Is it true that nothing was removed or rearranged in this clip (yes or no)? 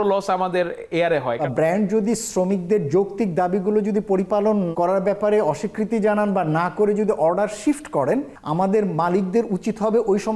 no